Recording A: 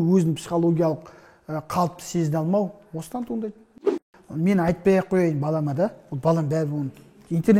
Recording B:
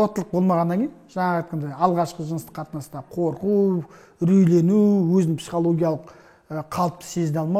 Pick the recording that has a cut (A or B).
A